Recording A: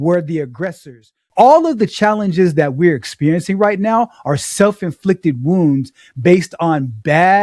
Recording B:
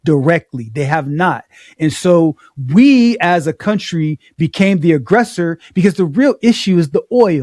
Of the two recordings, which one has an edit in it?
A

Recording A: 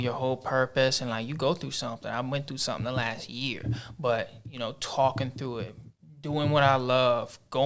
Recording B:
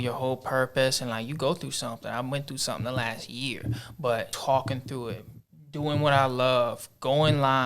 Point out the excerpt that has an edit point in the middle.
B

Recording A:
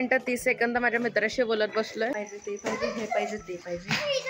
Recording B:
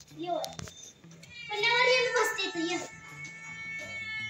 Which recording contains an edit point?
A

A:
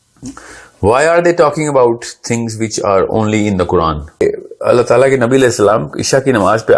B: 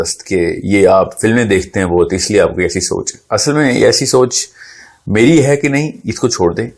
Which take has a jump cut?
A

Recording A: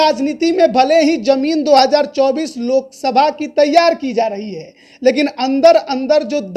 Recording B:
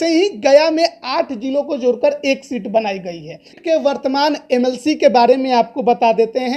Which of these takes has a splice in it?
B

